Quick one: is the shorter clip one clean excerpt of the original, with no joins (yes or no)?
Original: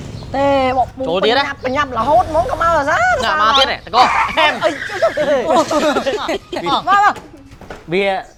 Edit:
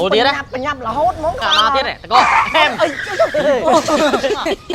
no